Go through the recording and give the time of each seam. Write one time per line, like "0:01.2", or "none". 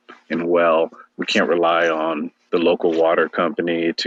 none